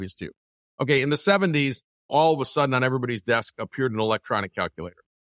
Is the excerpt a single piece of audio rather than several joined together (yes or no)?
no